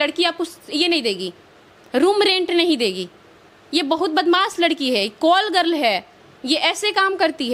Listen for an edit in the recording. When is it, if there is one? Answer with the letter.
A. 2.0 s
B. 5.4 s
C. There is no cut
C